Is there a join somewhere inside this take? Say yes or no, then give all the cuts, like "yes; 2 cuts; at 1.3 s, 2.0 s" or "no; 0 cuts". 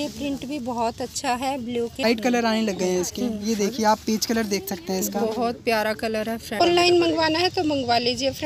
yes; 2 cuts; at 2.0 s, 6.6 s